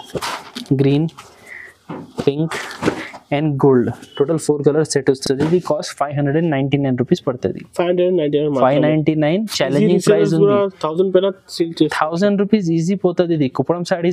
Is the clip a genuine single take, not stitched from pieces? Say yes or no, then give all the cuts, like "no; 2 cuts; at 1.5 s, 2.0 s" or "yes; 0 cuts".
yes; 0 cuts